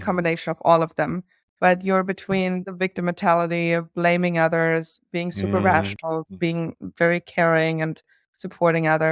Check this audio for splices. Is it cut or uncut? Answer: cut